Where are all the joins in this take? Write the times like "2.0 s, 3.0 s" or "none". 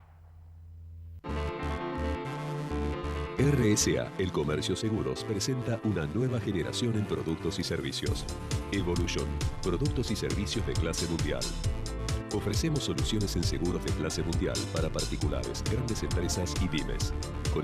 1.2 s